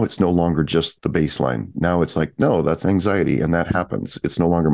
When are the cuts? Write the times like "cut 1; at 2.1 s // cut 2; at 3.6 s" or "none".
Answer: none